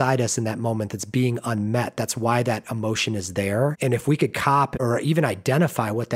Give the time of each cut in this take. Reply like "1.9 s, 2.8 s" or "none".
4.8 s